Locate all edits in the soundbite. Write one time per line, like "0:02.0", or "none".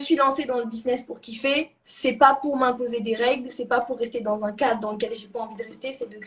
0:01.8